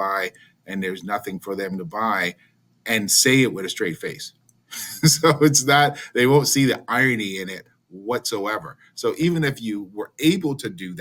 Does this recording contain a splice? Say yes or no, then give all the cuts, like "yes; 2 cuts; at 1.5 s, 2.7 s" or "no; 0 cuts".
no; 0 cuts